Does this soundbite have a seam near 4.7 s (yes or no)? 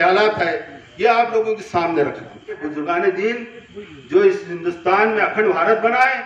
no